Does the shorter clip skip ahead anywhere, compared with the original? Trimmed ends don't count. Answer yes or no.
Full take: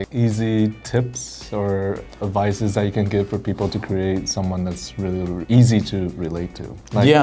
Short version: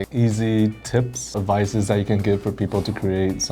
yes